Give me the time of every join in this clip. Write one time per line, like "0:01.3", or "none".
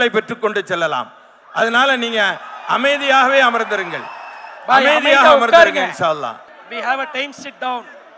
0:06.5